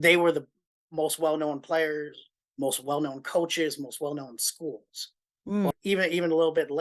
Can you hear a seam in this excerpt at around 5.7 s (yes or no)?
yes